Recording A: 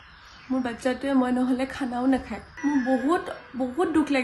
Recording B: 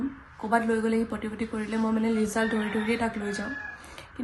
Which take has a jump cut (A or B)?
A